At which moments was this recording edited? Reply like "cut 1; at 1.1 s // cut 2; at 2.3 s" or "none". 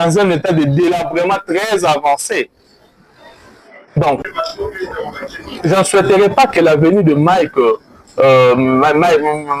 cut 1; at 4.3 s